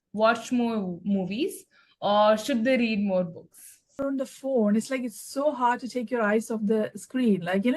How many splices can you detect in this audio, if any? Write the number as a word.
one